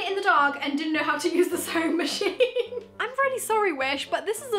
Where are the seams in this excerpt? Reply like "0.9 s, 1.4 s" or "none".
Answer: 3.0 s